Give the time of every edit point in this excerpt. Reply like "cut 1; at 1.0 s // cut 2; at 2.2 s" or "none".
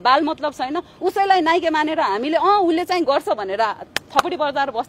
none